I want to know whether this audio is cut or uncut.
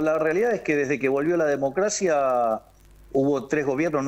uncut